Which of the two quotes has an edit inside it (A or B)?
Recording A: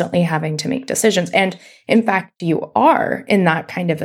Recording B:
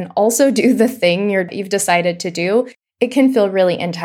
B